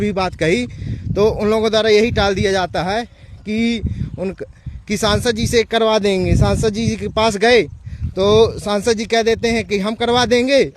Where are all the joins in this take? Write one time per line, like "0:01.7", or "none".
0:07.5